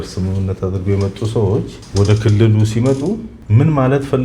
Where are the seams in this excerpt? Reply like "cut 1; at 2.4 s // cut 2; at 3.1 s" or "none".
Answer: cut 1; at 1.8 s // cut 2; at 3.4 s